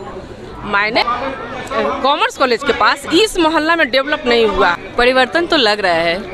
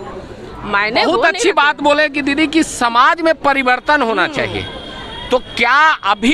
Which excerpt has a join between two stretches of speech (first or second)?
first